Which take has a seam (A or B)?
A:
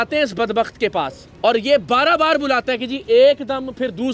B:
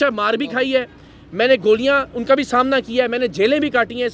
A